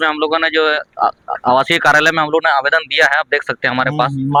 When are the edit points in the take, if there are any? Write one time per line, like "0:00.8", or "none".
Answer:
none